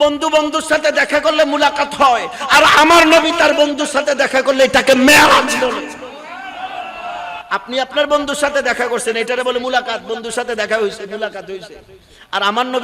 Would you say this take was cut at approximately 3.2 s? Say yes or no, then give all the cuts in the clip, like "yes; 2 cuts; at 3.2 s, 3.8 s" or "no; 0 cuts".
no; 1 cut; at 7.4 s